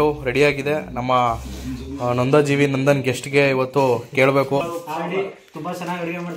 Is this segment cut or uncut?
cut